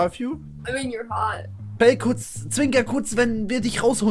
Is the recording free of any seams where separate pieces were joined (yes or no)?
no